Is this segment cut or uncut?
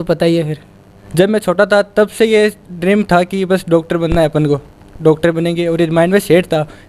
cut